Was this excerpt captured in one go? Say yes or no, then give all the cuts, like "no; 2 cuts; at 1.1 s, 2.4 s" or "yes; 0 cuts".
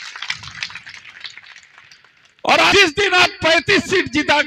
no; 1 cut; at 2.7 s